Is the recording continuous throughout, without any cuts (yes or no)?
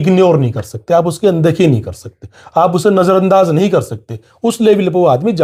yes